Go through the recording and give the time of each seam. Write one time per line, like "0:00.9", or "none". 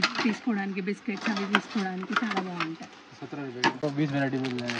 0:03.8